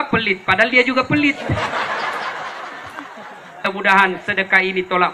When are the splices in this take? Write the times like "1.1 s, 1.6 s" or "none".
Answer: 3.7 s